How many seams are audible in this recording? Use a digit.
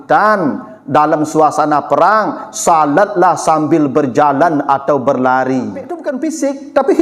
1